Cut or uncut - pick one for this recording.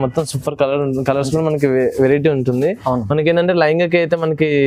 uncut